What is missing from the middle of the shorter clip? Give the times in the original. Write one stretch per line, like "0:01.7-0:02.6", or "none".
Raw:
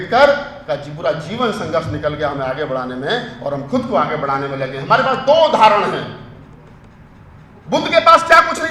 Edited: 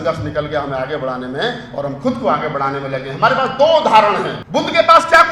0:06.1-0:07.6